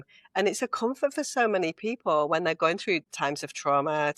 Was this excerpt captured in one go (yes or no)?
no